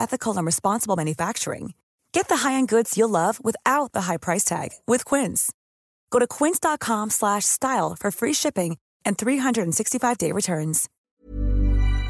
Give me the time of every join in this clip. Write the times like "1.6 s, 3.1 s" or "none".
10.9 s

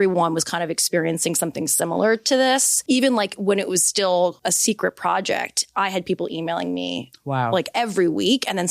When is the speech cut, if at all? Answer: 2.7 s, 4.4 s

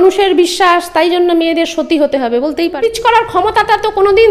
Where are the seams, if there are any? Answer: 2.8 s

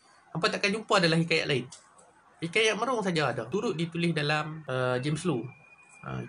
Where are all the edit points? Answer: 3.4 s, 4.6 s

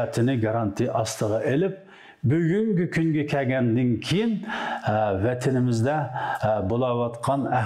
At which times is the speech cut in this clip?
none

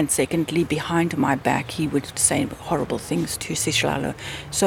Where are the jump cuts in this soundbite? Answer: 2.1 s, 3.4 s

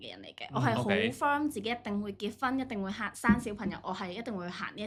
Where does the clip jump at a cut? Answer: none

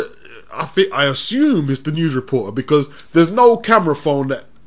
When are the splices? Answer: 1.6 s

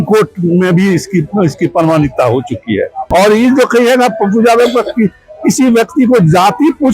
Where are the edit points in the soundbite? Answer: 3.2 s

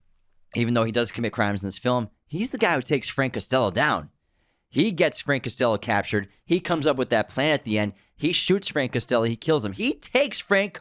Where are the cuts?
none

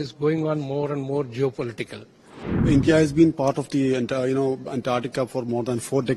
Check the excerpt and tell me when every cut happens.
2.6 s

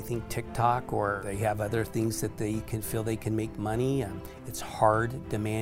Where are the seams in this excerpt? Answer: 1.2 s

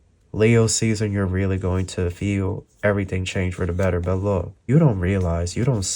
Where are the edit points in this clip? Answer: 4.7 s

